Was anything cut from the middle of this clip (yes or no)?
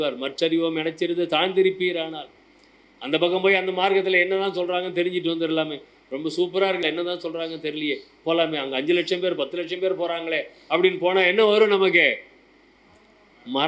yes